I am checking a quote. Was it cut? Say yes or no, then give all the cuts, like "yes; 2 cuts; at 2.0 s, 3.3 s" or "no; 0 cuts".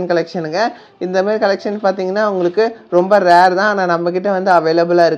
no; 0 cuts